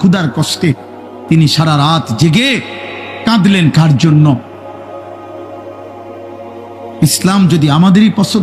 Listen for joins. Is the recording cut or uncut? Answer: uncut